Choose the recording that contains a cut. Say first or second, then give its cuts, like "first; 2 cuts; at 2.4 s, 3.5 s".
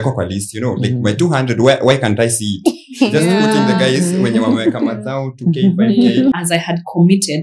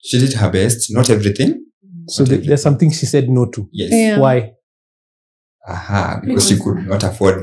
first; 1 cut; at 6.3 s